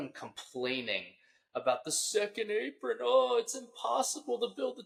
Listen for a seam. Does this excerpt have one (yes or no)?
no